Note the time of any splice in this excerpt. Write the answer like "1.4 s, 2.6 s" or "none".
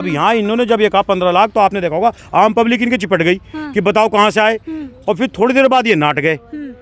none